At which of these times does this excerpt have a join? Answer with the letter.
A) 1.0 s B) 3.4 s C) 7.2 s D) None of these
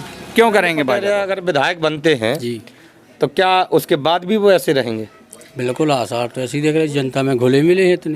A